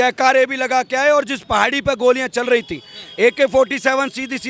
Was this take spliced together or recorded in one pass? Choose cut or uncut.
uncut